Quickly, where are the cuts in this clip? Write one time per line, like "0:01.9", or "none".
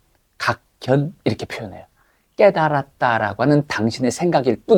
none